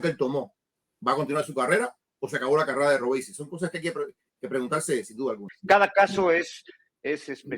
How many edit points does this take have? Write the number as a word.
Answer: one